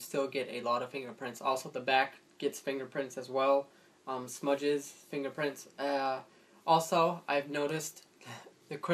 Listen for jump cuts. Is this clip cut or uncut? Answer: cut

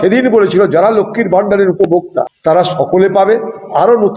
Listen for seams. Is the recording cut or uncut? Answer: uncut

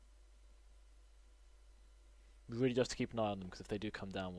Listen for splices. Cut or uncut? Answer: uncut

